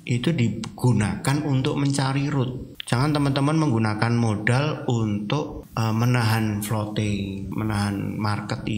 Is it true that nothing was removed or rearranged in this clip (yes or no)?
no